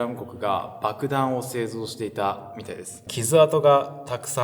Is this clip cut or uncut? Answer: cut